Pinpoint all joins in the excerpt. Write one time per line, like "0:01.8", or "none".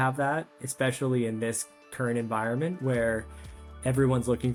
none